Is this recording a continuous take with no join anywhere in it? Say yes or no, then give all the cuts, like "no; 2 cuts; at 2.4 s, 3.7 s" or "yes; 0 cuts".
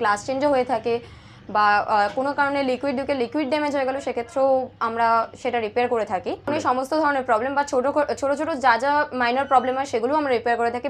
no; 1 cut; at 6.5 s